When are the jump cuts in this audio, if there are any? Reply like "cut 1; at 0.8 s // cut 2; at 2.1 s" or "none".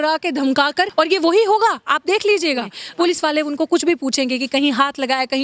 cut 1; at 0.9 s // cut 2; at 2.8 s